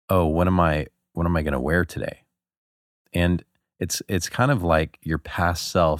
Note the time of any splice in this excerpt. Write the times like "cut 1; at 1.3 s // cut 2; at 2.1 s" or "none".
none